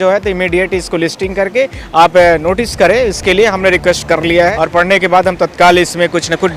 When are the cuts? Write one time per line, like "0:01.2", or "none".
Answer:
0:04.5